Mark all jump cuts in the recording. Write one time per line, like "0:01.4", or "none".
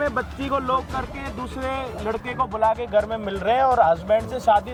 none